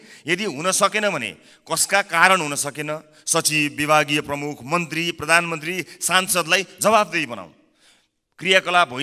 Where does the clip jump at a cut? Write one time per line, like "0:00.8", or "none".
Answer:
none